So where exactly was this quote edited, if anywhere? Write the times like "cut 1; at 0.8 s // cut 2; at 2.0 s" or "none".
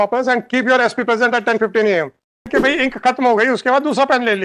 cut 1; at 2.5 s